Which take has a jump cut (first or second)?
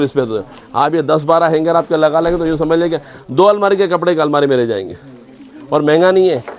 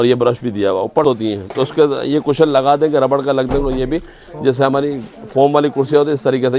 second